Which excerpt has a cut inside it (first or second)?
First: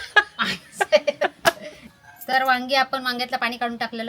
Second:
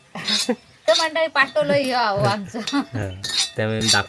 first